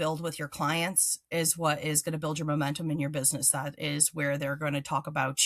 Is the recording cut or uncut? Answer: uncut